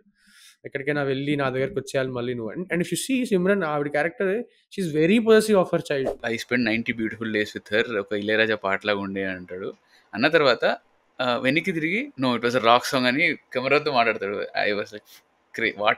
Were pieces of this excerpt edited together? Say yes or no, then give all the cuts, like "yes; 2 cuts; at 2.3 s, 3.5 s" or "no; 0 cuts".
yes; 2 cuts; at 6.2 s, 12.1 s